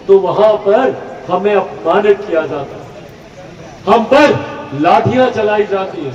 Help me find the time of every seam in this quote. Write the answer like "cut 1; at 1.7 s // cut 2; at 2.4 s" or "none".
none